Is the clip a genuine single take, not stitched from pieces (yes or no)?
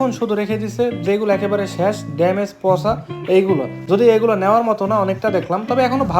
yes